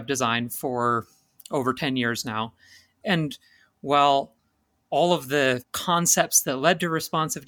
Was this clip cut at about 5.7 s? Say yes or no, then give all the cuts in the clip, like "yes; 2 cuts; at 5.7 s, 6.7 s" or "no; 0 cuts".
yes; 2 cuts; at 3.0 s, 5.7 s